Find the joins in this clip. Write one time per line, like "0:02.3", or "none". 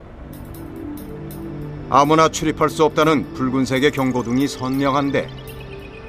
0:01.5